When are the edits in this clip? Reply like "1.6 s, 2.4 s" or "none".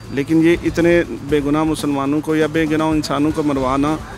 none

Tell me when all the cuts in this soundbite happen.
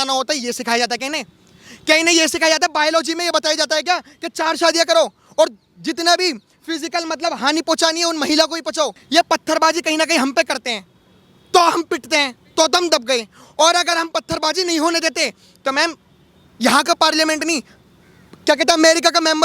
9.0 s

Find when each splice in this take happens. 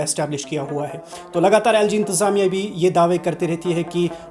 none

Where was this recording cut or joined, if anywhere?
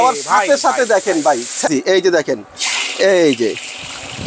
1.7 s

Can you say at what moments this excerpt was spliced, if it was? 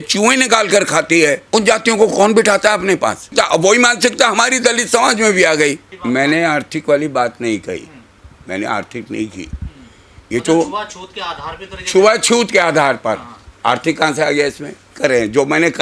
1.4 s, 3.3 s, 6.0 s

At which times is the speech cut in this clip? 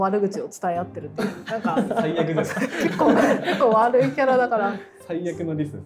none

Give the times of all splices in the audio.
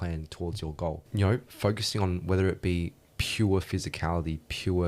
1.0 s

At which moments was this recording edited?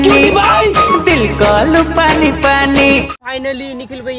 3.2 s

